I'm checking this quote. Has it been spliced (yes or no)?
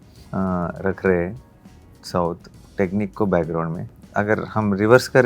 yes